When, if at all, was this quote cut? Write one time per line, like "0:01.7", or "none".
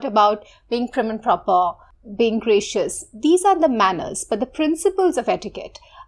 0:01.9